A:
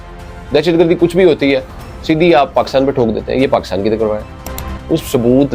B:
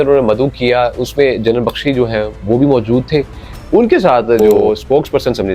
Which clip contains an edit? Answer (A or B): B